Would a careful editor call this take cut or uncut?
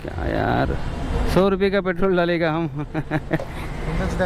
uncut